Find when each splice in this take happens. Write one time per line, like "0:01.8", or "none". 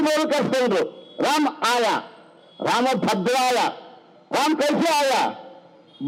none